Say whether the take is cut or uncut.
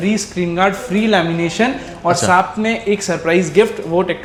uncut